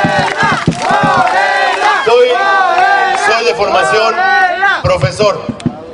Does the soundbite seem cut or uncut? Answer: cut